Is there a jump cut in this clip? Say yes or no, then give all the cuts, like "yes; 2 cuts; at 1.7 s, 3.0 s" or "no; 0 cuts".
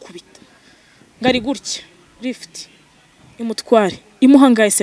no; 0 cuts